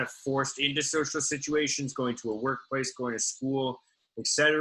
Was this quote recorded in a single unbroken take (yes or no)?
yes